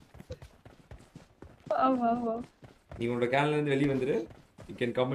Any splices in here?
no; 0 cuts

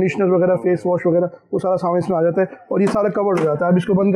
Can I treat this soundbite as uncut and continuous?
yes; 0 cuts

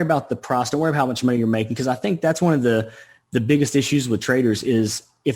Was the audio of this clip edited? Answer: no; 0 cuts

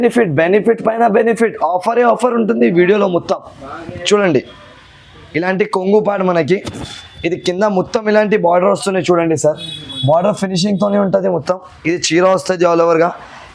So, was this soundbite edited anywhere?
no; 0 cuts

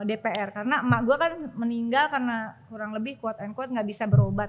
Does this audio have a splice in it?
no; 0 cuts

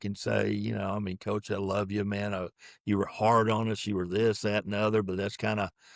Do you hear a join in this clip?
no; 0 cuts

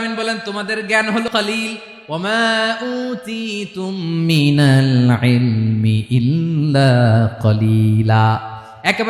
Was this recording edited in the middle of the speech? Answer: yes; 1 cut; at 1.3 s

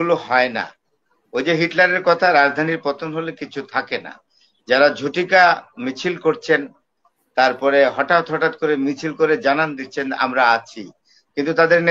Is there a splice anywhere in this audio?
no; 0 cuts

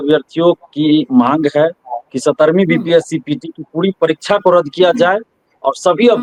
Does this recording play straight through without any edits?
yes; 0 cuts

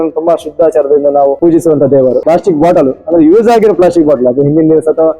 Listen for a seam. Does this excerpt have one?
yes; 2 cuts; at 1.4 s, 2.2 s

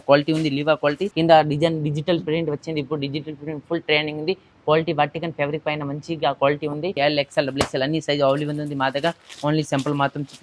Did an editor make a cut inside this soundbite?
yes; 2 cuts; at 1.1 s, 6.9 s

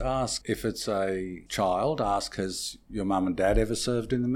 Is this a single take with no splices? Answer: yes; 0 cuts

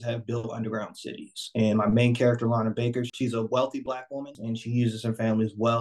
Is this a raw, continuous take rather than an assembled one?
no; 2 cuts; at 3.1 s, 4.4 s

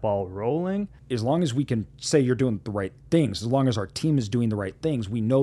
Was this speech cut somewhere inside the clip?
yes; 1 cut; at 1.0 s

